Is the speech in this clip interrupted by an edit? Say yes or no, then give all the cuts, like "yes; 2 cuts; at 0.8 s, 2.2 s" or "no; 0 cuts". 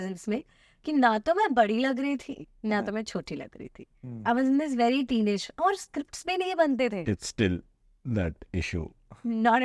no; 0 cuts